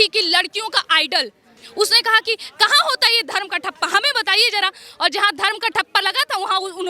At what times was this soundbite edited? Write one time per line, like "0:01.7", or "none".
0:01.6